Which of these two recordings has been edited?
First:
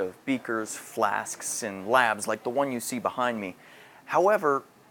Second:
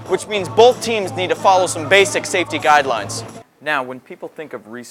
second; 1 cut; at 3.2 s

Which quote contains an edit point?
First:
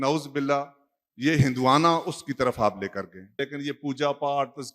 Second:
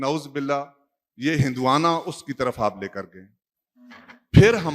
first; 1 cut; at 3.4 s

